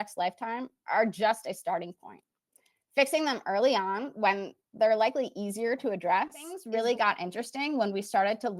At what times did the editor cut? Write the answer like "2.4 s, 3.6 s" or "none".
6.6 s